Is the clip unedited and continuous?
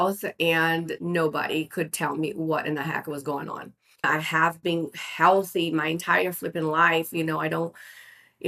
no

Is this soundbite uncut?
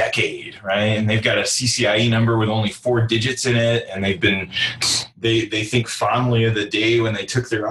no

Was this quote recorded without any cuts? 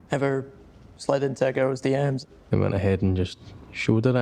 no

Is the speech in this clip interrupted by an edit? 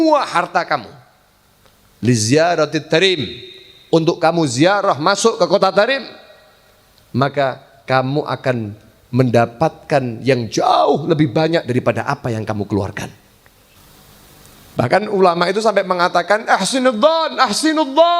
yes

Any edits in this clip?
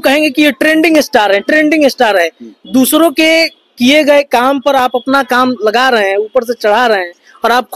no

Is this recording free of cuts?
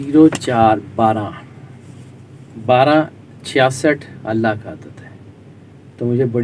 yes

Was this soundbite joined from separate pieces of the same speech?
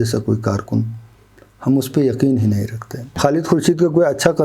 yes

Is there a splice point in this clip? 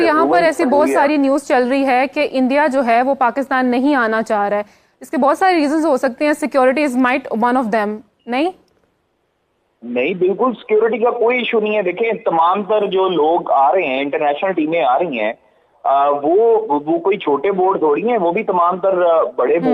no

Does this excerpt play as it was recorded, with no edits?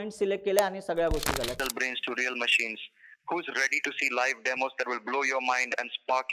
no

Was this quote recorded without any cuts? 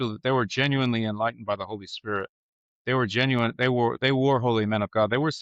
yes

